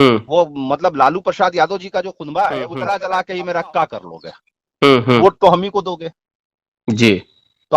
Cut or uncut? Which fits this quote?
cut